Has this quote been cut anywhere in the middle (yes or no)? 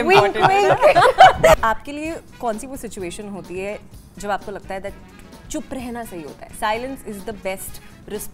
yes